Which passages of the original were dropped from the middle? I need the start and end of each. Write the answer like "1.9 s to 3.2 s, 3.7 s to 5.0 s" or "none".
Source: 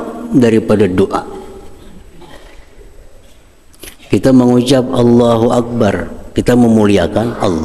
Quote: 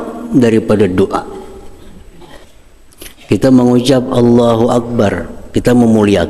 2.5 s to 3.3 s